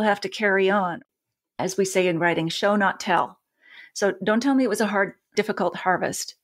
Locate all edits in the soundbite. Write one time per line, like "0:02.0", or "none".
0:01.0

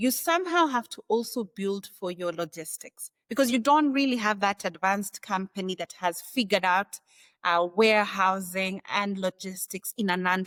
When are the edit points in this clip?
none

